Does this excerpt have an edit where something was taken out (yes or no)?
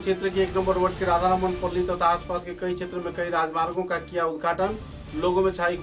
no